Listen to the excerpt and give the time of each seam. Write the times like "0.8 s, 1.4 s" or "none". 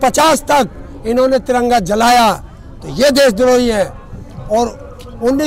none